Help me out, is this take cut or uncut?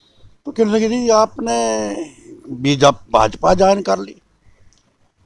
uncut